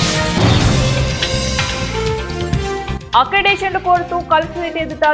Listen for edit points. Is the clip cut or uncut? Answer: cut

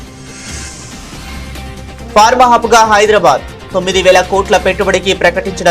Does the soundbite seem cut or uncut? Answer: cut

